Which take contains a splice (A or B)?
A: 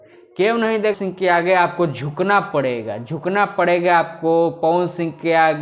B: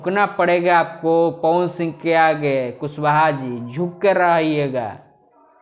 A